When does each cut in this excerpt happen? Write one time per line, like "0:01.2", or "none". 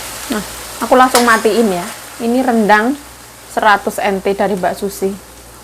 none